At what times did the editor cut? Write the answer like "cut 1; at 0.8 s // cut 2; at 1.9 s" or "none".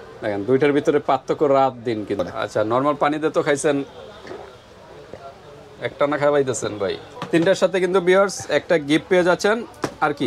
cut 1; at 2.2 s // cut 2; at 7.1 s